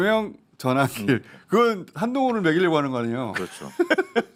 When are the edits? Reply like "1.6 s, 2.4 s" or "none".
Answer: none